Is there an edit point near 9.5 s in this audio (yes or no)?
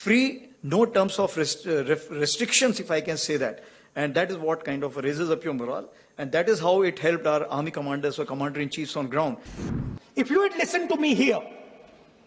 yes